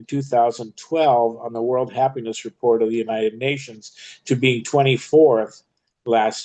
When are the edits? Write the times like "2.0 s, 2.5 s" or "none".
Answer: none